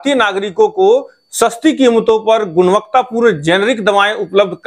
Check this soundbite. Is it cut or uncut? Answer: uncut